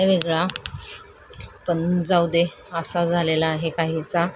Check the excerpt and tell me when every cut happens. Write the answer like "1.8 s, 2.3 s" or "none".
none